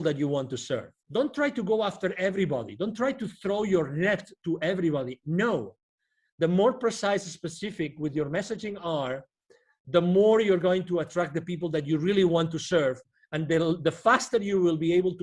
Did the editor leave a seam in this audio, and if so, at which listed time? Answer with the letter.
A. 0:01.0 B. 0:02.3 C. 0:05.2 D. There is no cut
A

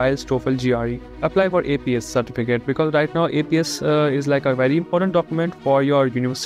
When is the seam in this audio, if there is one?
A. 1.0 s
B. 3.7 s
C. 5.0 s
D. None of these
A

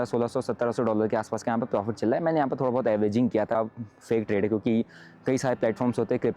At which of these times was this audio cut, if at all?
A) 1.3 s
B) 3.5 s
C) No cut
B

